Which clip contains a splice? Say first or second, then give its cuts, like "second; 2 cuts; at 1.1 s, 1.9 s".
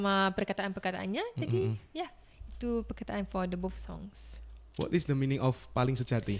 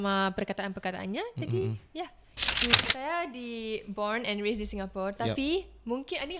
second; 1 cut; at 2.7 s